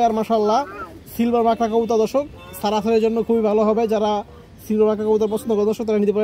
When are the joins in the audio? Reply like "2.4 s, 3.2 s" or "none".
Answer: none